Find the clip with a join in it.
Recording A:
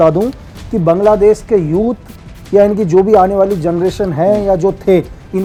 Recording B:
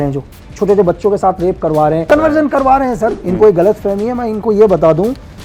B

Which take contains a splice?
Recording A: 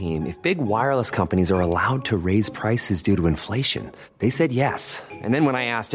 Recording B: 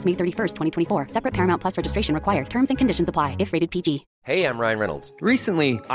B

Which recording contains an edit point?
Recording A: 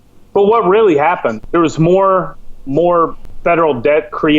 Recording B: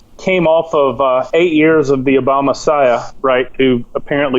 A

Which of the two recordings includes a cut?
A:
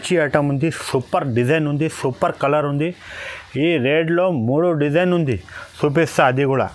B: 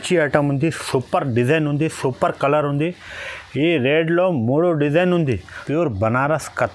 B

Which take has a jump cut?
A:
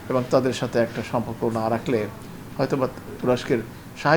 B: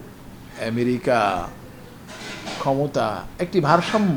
A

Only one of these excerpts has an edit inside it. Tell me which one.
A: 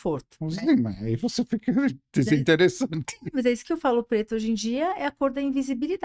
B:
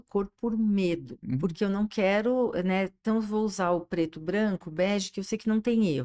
B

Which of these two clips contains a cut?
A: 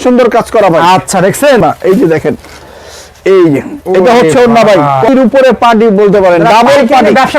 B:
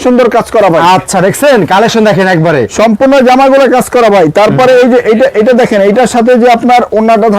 A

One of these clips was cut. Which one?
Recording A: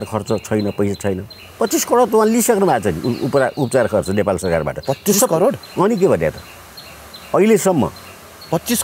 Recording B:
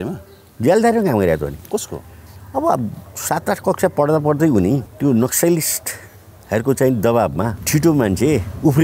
B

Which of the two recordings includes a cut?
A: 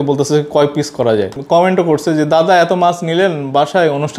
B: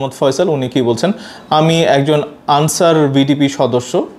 A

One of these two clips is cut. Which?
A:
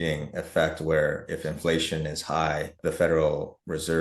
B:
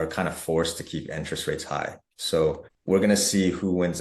A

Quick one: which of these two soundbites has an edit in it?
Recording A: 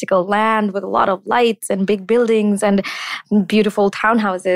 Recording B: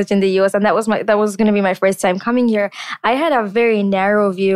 B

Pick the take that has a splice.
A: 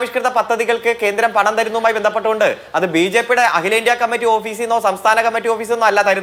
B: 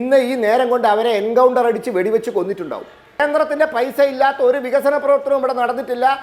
B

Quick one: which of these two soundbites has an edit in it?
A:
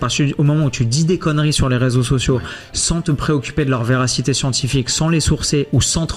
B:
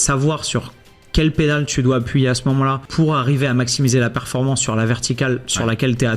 B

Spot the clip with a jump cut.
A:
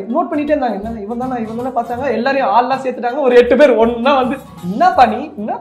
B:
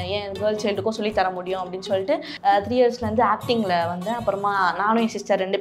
B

